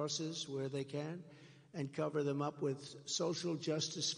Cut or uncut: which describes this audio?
cut